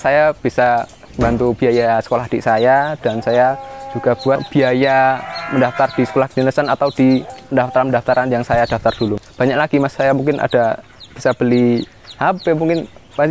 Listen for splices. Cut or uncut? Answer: cut